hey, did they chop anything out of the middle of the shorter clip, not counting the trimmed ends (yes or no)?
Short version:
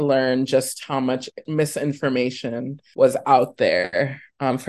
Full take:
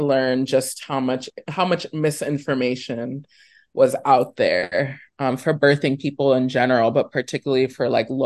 yes